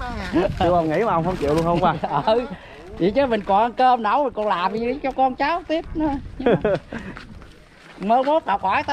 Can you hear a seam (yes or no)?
no